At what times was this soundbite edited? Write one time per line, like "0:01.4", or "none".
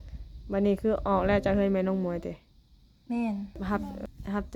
0:03.6

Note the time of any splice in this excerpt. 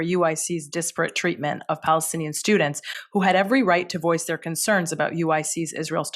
none

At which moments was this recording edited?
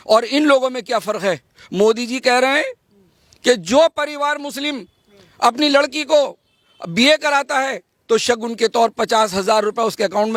none

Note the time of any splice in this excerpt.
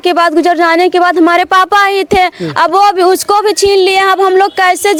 none

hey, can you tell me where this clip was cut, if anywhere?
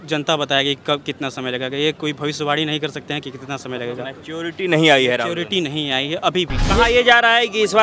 0:06.7

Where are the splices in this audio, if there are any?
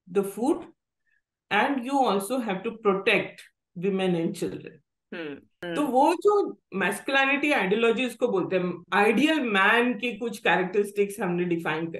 0:05.5

